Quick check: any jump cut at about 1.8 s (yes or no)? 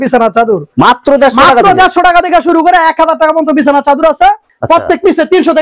no